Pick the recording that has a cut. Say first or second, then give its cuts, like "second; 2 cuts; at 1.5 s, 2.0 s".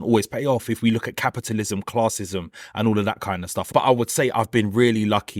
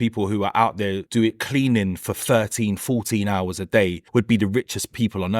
second; 2 cuts; at 1.0 s, 4.0 s